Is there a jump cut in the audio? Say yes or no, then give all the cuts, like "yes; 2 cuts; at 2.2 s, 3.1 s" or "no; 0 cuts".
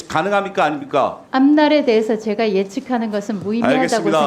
no; 0 cuts